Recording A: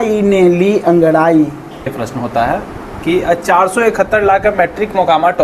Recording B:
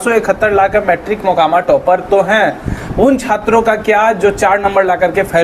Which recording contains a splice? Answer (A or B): A